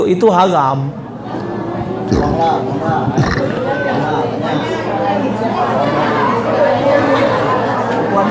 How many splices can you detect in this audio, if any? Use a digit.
0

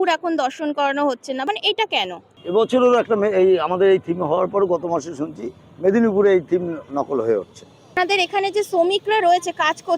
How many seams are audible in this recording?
2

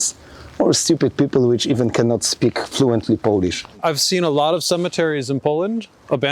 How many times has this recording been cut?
1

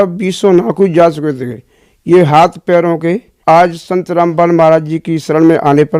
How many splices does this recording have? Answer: 1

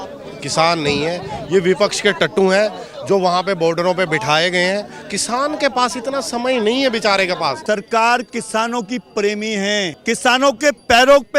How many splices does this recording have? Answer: 2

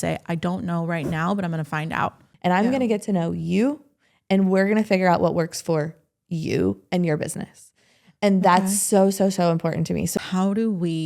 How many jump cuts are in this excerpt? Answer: 2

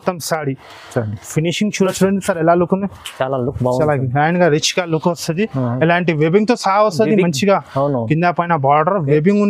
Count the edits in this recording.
1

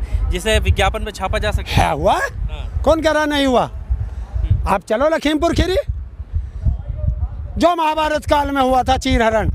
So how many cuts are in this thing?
0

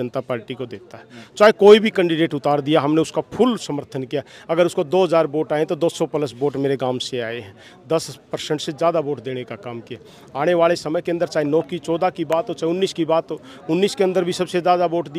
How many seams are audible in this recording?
0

